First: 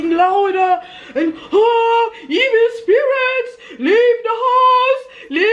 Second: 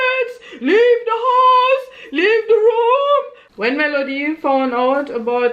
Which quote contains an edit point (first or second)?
second